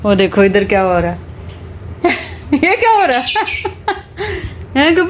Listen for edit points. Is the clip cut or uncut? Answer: uncut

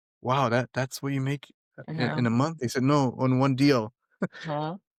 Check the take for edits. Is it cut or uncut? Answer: uncut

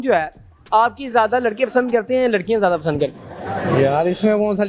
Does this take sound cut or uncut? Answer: uncut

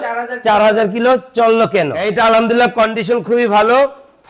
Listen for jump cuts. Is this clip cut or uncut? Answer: cut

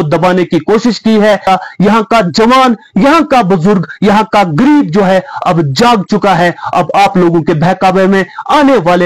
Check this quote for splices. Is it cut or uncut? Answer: cut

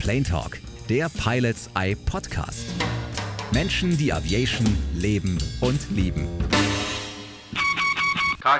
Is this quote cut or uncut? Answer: uncut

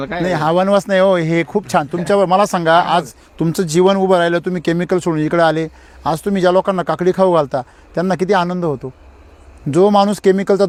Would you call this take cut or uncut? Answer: uncut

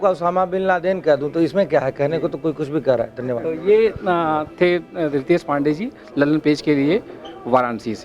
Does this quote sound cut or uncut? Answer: uncut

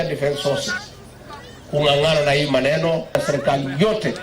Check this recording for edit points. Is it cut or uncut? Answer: cut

